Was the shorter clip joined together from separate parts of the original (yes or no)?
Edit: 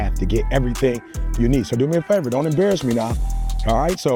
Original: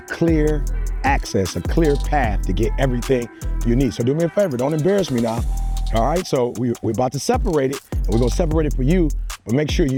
no